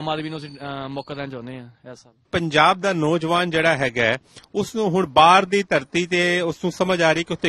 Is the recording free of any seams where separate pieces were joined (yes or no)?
no